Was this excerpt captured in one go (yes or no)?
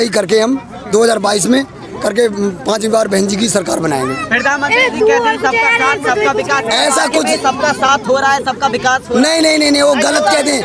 yes